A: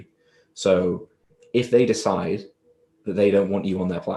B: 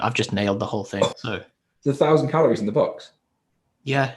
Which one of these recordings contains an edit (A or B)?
B